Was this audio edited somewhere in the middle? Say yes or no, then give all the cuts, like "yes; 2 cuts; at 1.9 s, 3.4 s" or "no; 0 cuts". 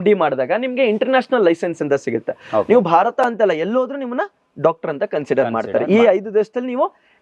no; 0 cuts